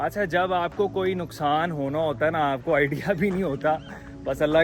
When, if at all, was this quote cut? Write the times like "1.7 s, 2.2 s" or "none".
none